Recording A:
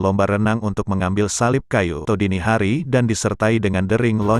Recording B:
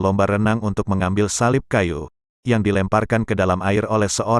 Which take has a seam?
A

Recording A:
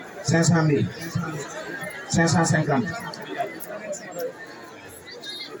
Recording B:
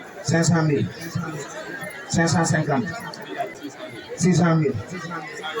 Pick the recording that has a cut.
B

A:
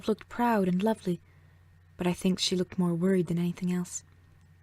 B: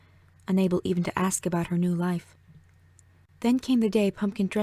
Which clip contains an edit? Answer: B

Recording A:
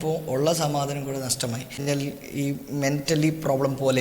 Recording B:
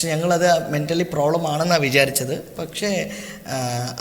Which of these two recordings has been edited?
A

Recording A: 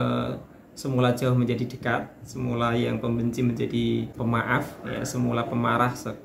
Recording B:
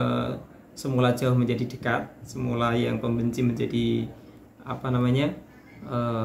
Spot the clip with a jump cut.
A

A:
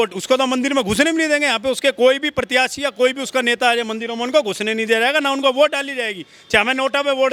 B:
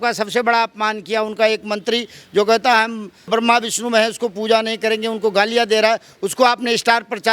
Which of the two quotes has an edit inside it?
B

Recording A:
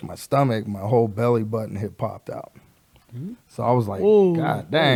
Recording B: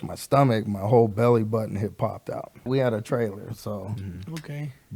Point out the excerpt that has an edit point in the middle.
B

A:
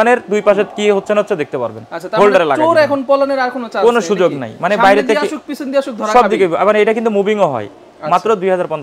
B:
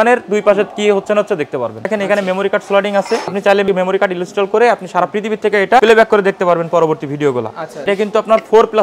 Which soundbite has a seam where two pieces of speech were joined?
B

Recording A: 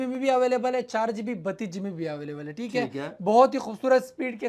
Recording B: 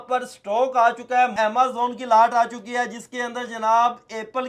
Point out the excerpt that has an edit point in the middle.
B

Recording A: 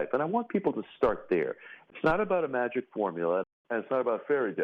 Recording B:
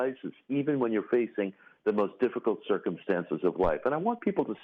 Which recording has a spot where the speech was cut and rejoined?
A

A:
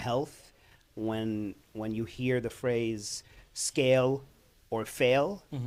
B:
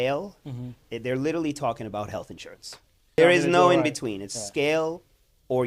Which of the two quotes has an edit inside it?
B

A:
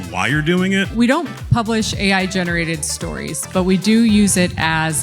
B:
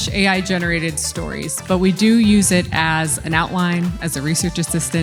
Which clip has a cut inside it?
A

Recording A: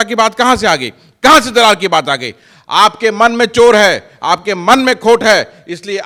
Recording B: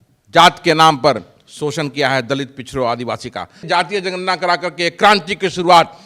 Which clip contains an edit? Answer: B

